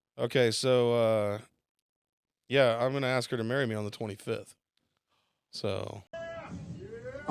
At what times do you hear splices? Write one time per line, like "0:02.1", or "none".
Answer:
0:06.0